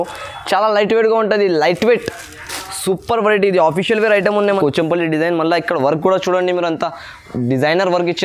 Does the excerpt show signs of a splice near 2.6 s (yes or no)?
no